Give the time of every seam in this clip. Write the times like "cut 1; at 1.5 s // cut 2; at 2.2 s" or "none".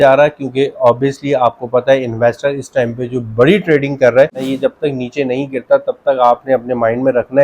cut 1; at 4.5 s

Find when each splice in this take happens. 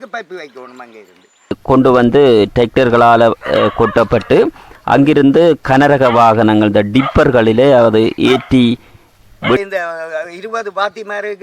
cut 1; at 1.6 s // cut 2; at 9.6 s

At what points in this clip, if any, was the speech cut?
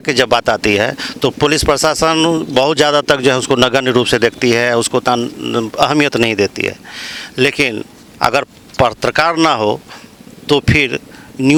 none

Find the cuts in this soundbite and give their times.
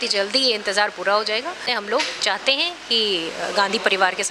cut 1; at 1.7 s

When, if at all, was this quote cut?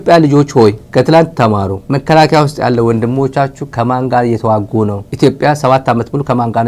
cut 1; at 0.8 s // cut 2; at 1.8 s // cut 3; at 5.0 s

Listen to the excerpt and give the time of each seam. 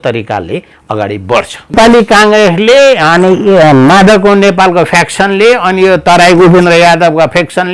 cut 1; at 1.8 s

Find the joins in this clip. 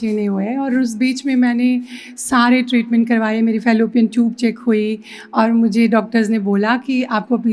none

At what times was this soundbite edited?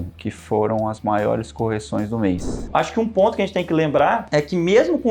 cut 1; at 2.6 s // cut 2; at 4.2 s

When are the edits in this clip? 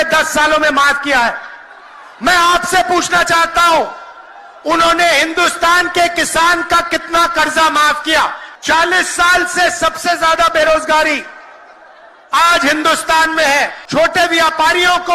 cut 1; at 8.5 s // cut 2; at 13.8 s

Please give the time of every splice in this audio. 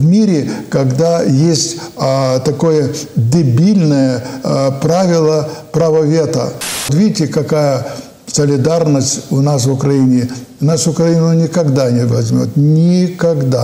cut 1; at 6.9 s

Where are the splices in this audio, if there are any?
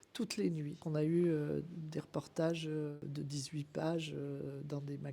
cut 1; at 0.8 s // cut 2; at 3.0 s

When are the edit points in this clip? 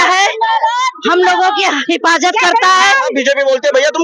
cut 1; at 3.1 s

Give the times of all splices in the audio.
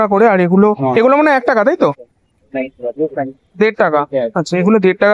none

